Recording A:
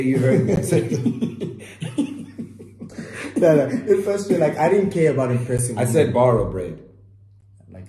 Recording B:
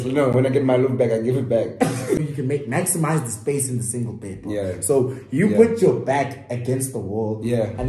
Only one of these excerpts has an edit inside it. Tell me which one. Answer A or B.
B